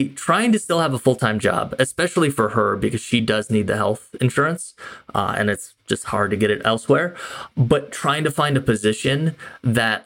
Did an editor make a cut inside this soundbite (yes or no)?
yes